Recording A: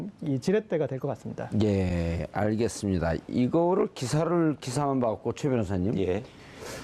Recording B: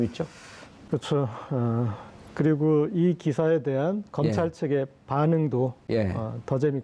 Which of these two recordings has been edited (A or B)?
A